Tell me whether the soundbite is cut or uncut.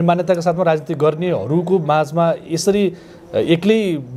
uncut